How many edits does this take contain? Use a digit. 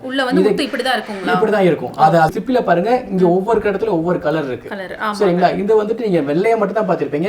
1